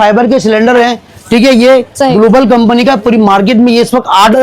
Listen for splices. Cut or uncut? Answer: uncut